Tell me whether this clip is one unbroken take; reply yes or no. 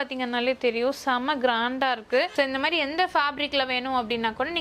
no